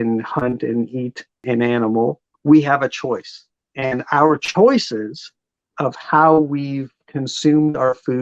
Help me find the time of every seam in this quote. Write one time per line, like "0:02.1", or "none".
0:01.4
0:02.3